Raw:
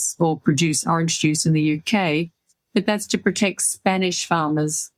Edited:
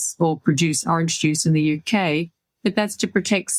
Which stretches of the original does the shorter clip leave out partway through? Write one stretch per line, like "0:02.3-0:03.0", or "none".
0:02.4-0:02.5